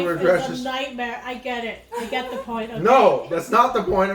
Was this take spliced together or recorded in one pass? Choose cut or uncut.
uncut